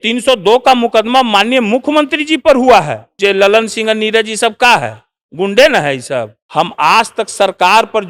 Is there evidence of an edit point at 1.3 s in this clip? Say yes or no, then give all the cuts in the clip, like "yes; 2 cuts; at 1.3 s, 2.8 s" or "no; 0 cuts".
no; 2 cuts; at 3.1 s, 6.4 s